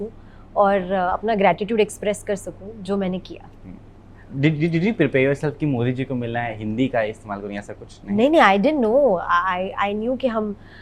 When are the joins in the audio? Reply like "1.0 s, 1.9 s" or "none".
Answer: none